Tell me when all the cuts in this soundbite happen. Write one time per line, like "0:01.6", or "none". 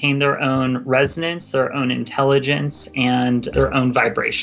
0:03.5